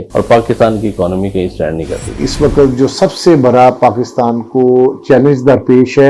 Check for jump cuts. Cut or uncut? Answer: cut